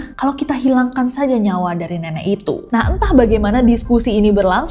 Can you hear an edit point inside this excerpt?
no; 0 cuts

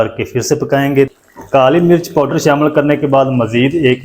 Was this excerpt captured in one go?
no; 1 cut; at 1.1 s

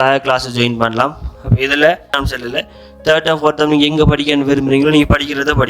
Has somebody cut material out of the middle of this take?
yes; 1 cut; at 2.1 s

